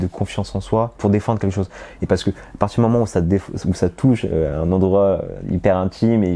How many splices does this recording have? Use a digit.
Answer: 1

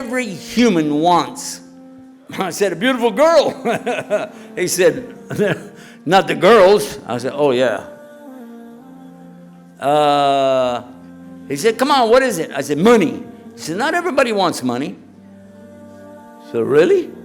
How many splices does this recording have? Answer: 2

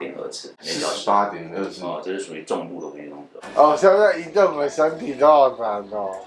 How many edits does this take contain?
1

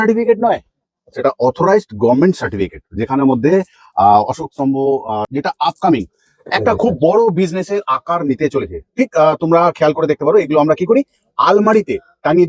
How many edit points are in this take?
1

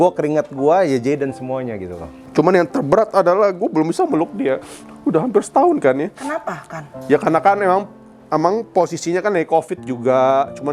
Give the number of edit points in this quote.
1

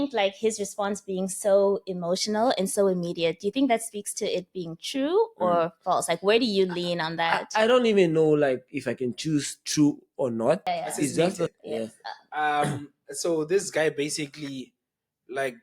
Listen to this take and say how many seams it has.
1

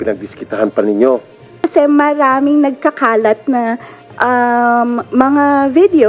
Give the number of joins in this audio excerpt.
1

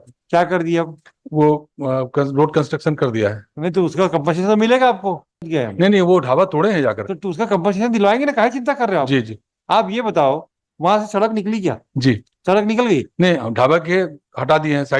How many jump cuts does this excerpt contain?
1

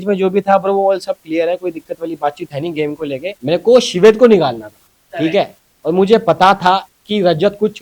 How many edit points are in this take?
1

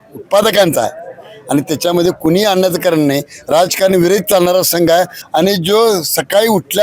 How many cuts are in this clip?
1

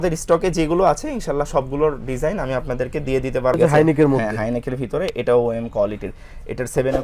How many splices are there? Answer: 1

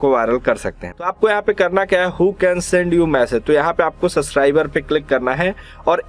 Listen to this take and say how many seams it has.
1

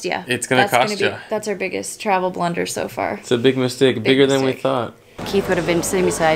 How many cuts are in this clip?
1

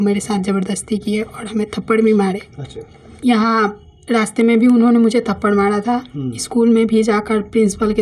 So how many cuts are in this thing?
1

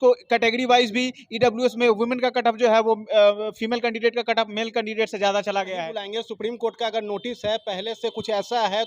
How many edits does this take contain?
1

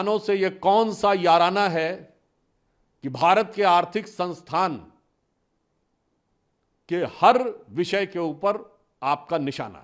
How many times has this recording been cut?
0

